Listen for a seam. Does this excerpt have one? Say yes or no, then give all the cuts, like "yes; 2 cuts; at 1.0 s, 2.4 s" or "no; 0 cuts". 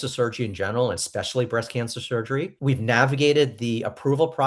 yes; 1 cut; at 2.5 s